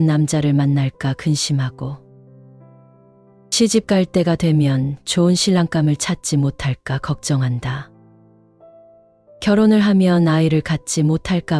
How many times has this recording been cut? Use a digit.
0